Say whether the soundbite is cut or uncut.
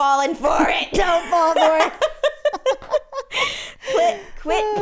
uncut